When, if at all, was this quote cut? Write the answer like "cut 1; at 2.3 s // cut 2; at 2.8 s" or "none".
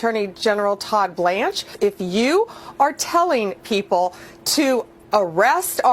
cut 1; at 1.7 s